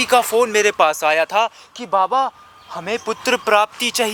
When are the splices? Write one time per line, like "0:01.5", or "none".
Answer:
none